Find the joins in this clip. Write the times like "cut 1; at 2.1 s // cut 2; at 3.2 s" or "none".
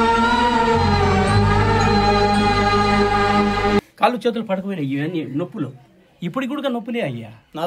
cut 1; at 3.8 s